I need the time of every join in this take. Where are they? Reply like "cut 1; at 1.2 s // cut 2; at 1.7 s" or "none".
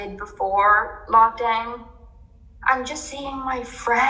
none